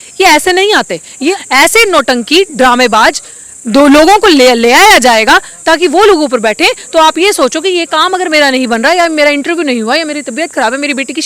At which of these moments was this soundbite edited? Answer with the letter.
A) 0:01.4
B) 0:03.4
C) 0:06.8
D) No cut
A